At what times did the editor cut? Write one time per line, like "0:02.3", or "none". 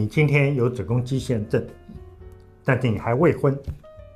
none